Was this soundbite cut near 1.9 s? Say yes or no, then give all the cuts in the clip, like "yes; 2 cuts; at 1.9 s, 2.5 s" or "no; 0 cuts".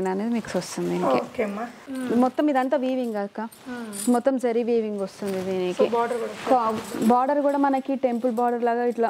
yes; 1 cut; at 1.9 s